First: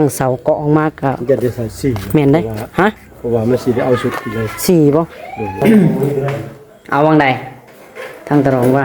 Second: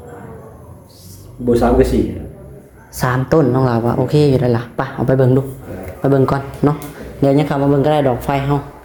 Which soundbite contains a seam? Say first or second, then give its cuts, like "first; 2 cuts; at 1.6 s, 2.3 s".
first; 1 cut; at 5.6 s